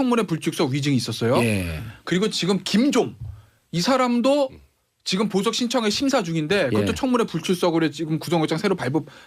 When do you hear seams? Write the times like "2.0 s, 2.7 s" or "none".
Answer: 3.0 s